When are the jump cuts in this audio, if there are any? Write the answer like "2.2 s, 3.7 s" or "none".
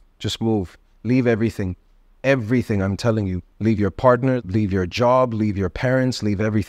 3.4 s, 4.4 s